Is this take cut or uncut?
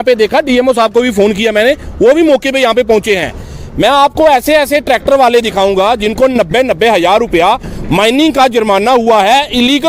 uncut